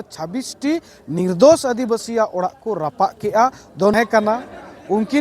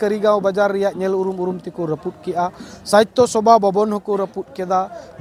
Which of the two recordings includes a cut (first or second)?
first